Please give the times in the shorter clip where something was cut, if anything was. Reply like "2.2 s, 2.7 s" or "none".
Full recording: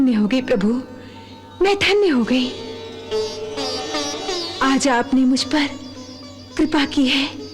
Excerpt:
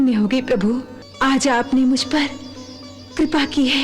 1.0 s